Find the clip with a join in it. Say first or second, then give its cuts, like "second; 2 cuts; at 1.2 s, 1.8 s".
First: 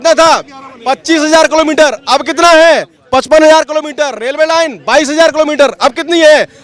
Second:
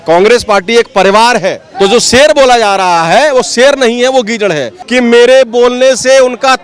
second; 2 cuts; at 1.6 s, 4.7 s